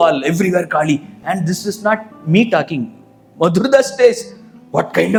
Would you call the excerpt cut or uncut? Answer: uncut